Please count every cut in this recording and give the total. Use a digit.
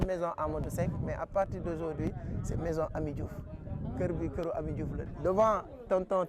1